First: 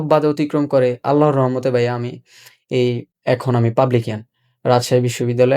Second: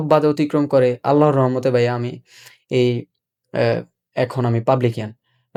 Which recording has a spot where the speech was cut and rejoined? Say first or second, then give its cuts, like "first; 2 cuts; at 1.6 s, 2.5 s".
first; 1 cut; at 3.1 s